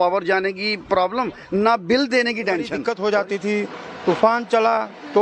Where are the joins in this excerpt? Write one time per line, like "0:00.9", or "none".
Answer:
0:02.8